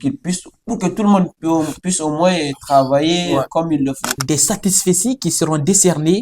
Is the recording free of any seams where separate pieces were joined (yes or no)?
no